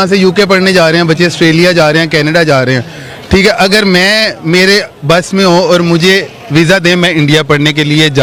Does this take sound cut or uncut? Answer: uncut